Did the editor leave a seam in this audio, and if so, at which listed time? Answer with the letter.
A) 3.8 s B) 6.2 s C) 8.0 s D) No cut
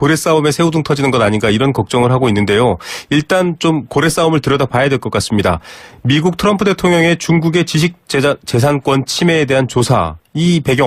B